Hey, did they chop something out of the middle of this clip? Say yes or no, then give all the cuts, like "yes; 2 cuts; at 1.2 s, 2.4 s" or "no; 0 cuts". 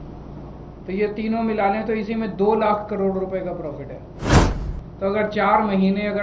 no; 0 cuts